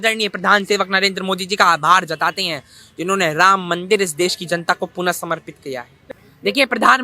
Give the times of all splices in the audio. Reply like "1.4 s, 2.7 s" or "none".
6.0 s